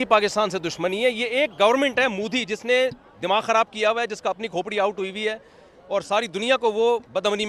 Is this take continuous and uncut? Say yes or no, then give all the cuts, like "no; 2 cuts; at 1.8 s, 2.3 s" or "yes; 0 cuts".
yes; 0 cuts